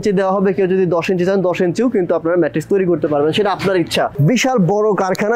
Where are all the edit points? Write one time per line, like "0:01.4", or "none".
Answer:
0:04.2